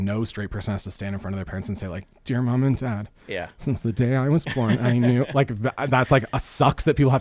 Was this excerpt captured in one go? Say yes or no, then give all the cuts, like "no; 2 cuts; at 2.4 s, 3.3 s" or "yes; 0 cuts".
yes; 0 cuts